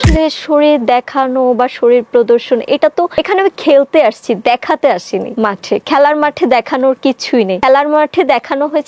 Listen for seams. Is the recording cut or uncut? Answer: cut